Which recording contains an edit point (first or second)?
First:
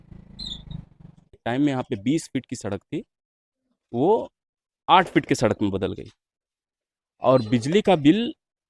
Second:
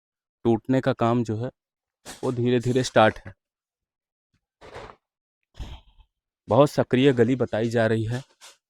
first